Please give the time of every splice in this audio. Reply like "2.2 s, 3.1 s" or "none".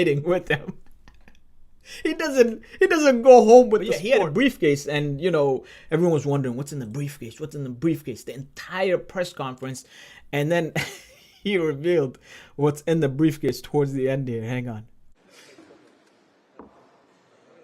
4.0 s